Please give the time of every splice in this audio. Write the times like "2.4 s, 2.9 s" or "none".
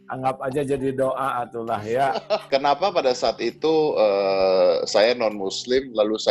2.4 s